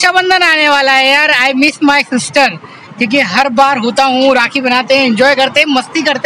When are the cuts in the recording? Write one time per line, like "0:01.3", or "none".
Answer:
none